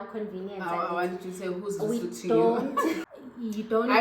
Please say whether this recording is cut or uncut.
cut